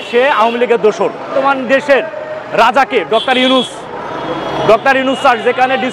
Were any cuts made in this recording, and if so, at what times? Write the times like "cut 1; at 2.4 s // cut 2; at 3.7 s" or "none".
cut 1; at 1.3 s